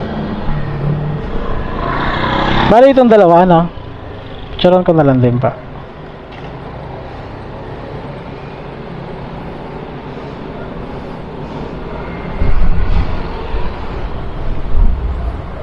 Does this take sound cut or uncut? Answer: uncut